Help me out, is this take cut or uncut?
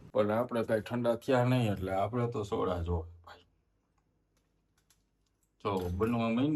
uncut